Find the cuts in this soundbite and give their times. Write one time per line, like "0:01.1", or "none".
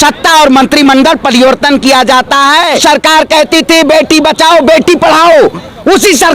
0:02.8